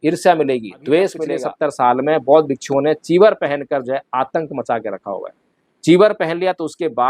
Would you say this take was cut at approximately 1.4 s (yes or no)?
yes